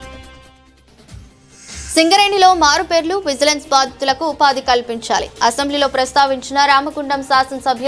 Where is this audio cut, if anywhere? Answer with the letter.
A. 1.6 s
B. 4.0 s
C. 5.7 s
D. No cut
A